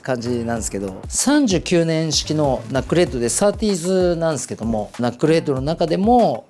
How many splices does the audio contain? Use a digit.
2